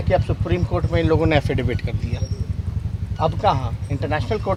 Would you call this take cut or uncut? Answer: uncut